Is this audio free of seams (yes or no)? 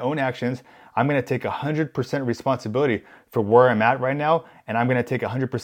yes